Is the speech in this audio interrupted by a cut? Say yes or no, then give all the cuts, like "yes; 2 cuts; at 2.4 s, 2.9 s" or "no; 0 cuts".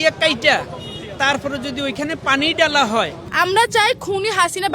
yes; 1 cut; at 3.2 s